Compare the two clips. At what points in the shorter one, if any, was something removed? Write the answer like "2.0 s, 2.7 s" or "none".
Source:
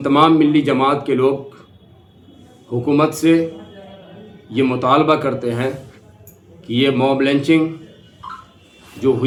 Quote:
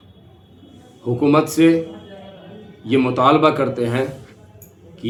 none